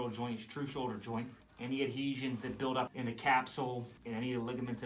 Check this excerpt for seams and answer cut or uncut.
cut